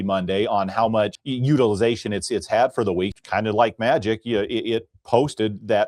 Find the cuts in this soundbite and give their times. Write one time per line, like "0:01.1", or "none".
0:01.2
0:03.1